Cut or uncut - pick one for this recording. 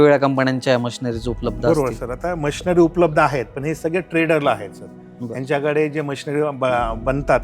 uncut